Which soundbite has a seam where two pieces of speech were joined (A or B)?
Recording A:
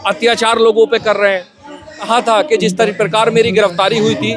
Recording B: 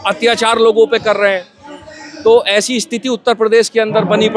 A